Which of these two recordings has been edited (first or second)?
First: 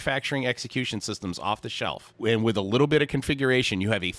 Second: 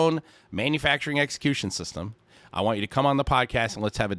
first